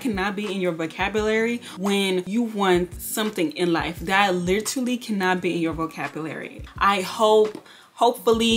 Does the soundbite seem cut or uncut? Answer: uncut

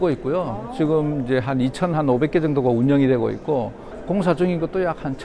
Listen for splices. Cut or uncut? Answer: uncut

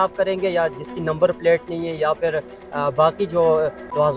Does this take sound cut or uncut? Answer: uncut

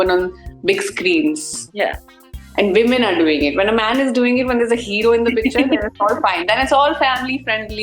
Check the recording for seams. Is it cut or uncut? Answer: uncut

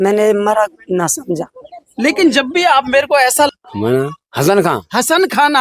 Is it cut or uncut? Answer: cut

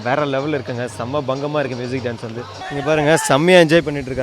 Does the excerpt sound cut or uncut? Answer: cut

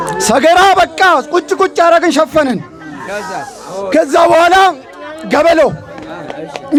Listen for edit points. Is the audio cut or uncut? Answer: uncut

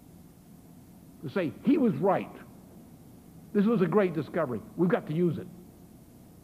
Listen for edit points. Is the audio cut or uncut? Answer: uncut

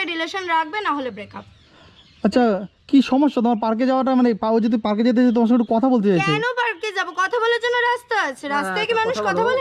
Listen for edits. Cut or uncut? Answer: uncut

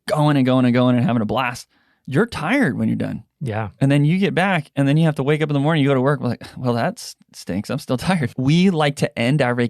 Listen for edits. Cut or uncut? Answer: cut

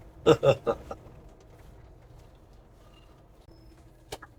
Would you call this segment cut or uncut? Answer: cut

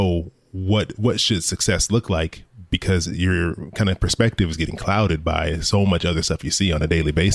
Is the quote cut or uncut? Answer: uncut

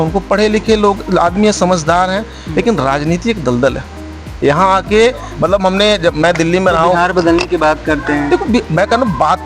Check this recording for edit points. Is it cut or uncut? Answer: uncut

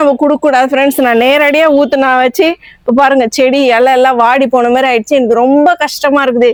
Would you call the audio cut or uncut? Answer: uncut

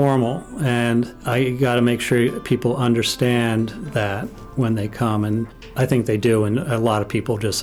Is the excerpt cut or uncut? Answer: cut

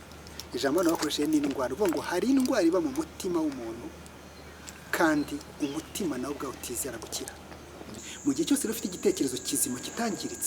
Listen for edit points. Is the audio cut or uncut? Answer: cut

